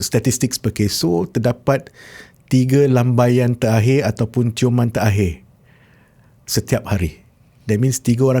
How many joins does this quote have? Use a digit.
0